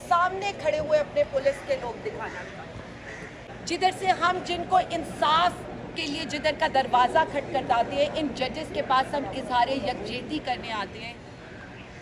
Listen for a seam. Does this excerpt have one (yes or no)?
yes